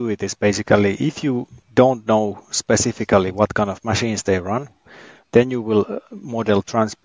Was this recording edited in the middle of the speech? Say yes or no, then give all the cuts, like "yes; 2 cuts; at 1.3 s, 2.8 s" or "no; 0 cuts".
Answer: yes; 1 cut; at 1.5 s